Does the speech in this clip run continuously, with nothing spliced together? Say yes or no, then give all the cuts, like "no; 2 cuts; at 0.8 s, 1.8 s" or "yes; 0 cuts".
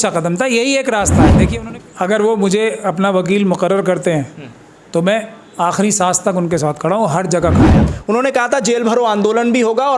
no; 2 cuts; at 1.4 s, 7.9 s